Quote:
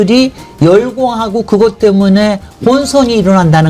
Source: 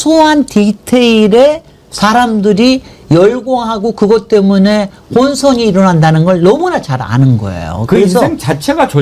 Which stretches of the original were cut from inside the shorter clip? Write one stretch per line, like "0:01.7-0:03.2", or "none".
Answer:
none

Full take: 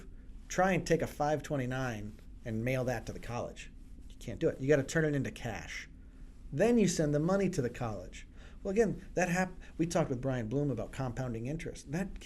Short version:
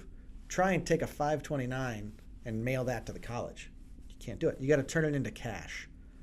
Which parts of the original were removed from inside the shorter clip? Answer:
none

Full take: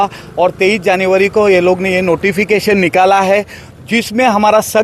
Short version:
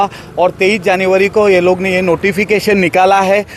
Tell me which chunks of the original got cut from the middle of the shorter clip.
none

